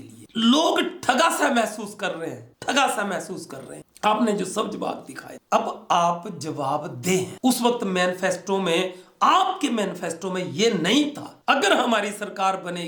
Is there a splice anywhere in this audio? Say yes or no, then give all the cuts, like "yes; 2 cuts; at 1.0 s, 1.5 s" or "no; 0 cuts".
no; 0 cuts